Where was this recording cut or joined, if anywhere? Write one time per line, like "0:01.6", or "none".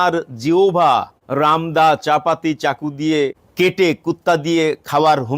0:01.2
0:03.4